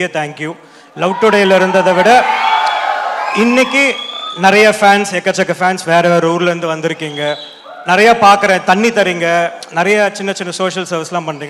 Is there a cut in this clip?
no; 0 cuts

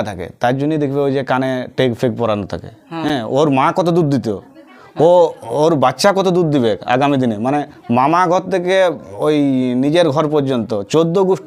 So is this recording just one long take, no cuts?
yes; 0 cuts

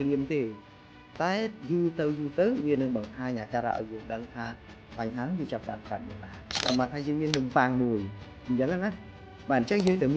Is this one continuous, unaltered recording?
no; 1 cut; at 6.6 s

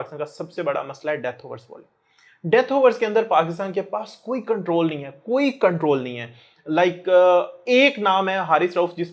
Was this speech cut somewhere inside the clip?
no; 0 cuts

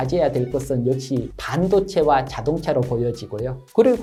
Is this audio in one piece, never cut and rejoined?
yes; 0 cuts

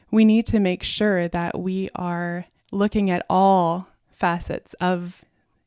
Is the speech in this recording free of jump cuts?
no; 2 cuts; at 2.5 s, 4.0 s

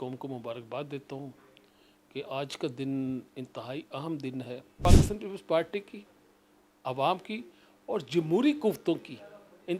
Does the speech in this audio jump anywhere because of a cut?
yes; 1 cut; at 4.8 s

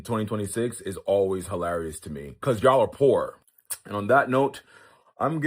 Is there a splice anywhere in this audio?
yes; 1 cut; at 3.3 s

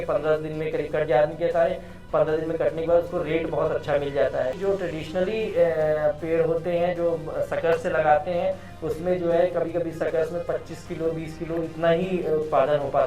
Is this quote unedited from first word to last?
no; 1 cut; at 4.5 s

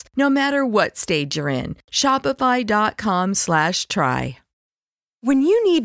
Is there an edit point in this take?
yes; 1 cut; at 4.5 s

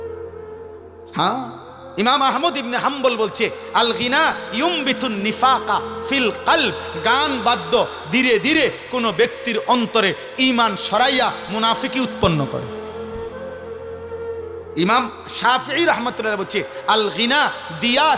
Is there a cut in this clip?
yes; 3 cuts; at 1.0 s, 12.6 s, 14.7 s

